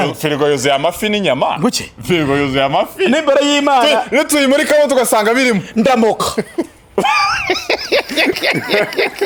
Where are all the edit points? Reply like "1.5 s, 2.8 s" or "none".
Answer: none